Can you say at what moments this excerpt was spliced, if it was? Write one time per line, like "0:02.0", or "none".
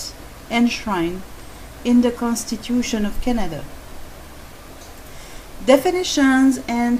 0:02.5

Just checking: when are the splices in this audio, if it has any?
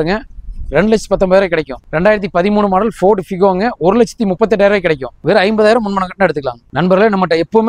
0:05.2
0:06.6

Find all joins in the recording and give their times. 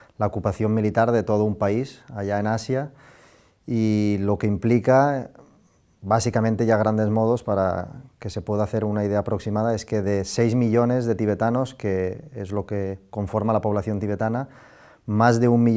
0:04.0

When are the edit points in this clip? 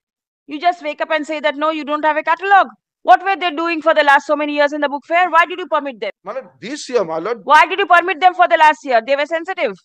0:06.0

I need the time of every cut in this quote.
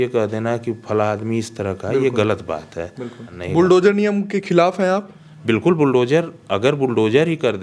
0:03.3

